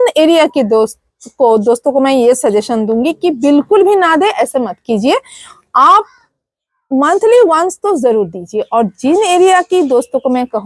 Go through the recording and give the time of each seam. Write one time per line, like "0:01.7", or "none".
none